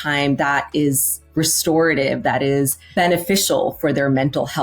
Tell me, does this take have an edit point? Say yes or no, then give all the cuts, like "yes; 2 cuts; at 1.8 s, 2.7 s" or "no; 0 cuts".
yes; 1 cut; at 2.8 s